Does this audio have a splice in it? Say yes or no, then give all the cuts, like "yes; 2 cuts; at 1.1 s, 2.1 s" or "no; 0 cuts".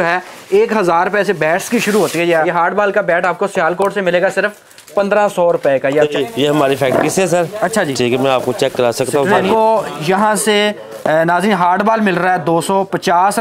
yes; 3 cuts; at 2.5 s, 6.1 s, 9.5 s